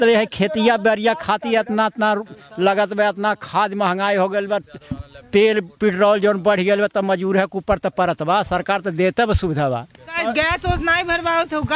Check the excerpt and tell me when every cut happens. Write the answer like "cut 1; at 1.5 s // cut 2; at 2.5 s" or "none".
none